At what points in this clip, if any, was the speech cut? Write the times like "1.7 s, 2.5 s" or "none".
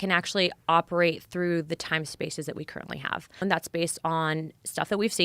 3.4 s